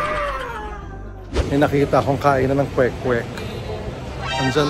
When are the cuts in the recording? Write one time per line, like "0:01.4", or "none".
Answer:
0:01.2